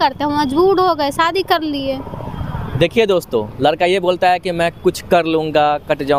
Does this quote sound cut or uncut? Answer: uncut